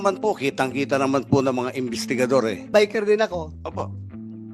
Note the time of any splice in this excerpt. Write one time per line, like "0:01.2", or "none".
0:02.6